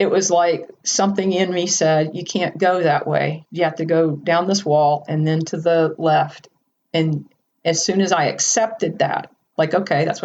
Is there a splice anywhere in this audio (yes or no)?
no